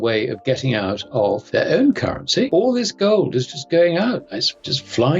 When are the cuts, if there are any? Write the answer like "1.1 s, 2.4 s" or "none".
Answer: 1.4 s, 2.5 s